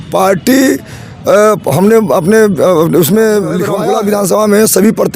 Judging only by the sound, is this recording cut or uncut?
cut